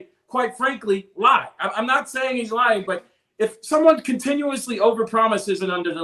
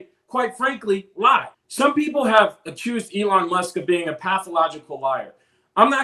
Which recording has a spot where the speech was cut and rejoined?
second; 1 cut; at 1.6 s

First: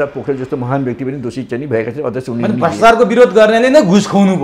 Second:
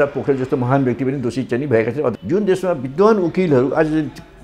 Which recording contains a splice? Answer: second; 1 cut; at 2.2 s

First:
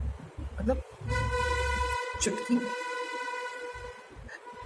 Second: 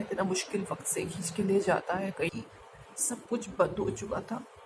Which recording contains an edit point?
second; 1 cut; at 2.3 s

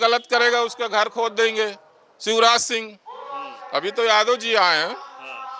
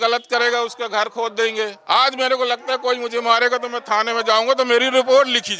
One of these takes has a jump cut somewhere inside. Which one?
second; 1 cut; at 1.8 s

